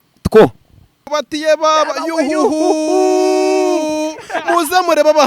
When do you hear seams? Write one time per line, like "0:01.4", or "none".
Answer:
0:01.0

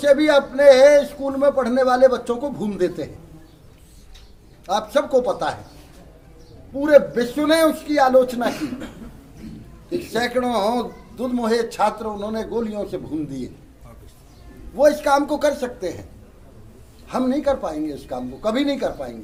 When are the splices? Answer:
none

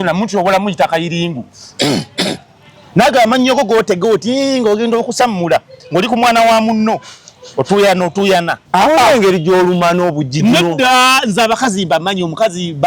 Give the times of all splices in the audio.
0:08.6

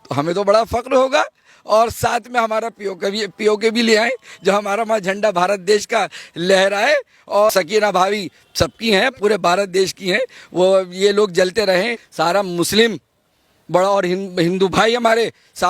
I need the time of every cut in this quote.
0:07.5
0:12.0

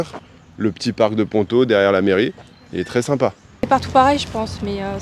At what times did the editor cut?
0:03.7

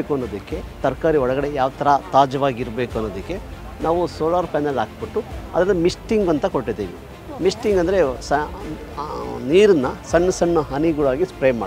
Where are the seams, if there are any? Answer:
none

